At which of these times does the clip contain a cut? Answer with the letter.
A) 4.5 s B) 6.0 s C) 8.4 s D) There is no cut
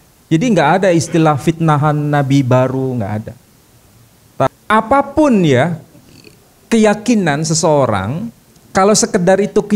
A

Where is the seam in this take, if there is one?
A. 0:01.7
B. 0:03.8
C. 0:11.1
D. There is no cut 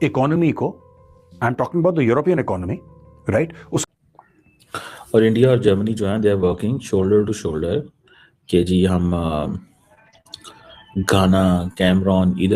B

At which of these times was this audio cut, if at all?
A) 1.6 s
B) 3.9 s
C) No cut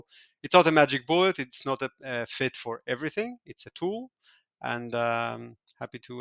C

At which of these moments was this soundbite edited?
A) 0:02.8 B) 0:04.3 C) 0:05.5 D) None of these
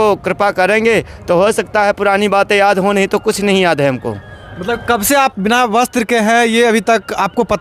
D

